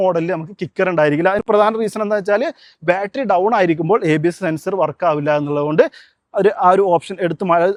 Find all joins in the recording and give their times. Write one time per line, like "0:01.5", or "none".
none